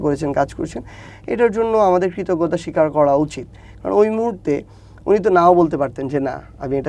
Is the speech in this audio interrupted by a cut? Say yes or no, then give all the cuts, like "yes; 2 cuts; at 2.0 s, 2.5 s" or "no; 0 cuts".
no; 0 cuts